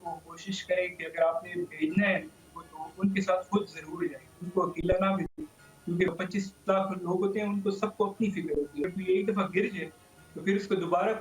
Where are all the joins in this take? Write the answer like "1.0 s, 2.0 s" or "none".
6.1 s, 8.9 s